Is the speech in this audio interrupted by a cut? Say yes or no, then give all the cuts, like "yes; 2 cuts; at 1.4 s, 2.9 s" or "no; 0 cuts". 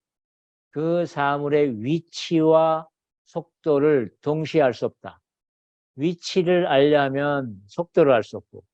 no; 0 cuts